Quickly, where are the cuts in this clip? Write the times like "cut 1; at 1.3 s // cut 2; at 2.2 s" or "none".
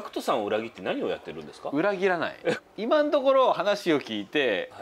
cut 1; at 2.6 s